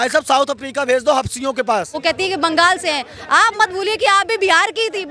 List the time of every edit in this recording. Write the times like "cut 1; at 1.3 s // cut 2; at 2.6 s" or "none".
cut 1; at 1.9 s